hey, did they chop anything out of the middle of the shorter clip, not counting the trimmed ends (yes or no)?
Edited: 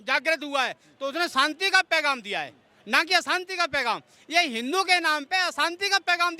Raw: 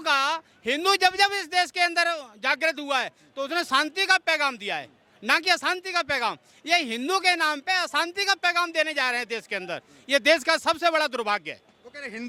no